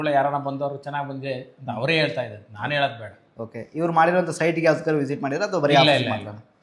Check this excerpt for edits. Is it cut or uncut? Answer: uncut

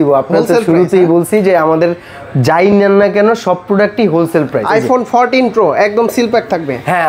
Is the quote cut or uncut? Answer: cut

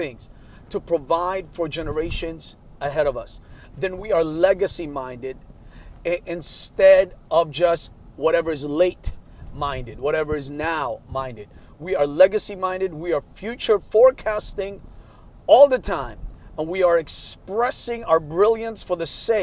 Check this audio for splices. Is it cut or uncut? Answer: uncut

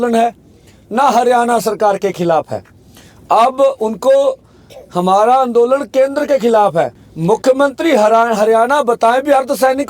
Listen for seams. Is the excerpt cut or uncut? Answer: cut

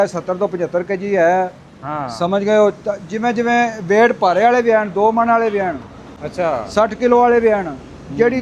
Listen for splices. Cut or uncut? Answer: uncut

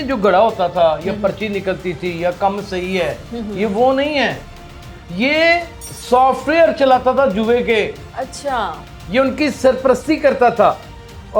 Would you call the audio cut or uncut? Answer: uncut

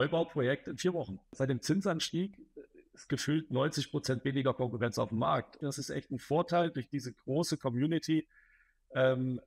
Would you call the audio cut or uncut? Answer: cut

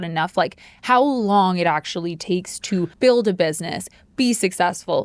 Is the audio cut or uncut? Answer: cut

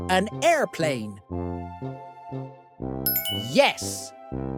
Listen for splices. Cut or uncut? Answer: uncut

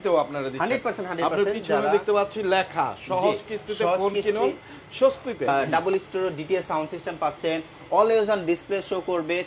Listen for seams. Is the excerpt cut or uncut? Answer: cut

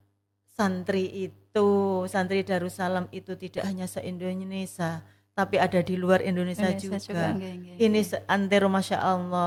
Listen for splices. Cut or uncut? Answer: uncut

